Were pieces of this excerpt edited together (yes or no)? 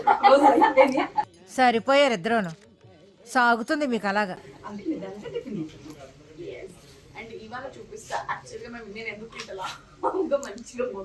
no